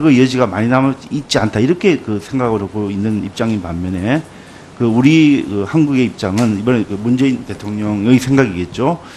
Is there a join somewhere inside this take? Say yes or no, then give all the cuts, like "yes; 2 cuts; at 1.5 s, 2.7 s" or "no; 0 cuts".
yes; 1 cut; at 2.5 s